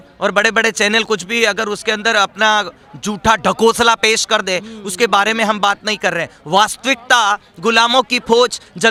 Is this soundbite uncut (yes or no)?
yes